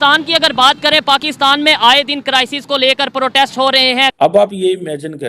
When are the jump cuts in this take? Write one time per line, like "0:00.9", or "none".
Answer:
0:04.1